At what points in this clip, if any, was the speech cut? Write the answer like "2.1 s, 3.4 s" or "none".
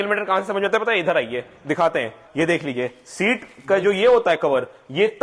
2.2 s